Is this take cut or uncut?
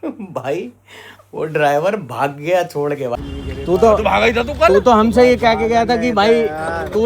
cut